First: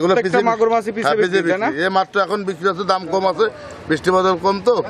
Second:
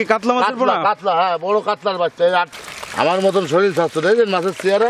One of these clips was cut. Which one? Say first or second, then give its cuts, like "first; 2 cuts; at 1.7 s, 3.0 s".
second; 1 cut; at 2.6 s